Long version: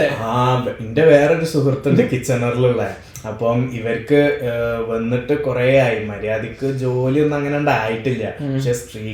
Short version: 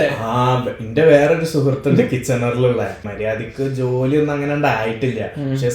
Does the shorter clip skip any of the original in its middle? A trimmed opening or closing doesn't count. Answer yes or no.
yes